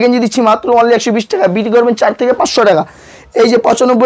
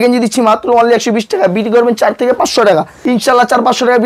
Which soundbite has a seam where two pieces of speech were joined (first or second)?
second